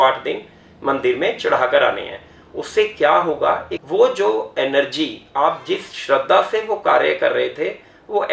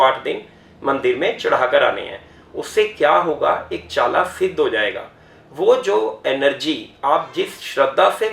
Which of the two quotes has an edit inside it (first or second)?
first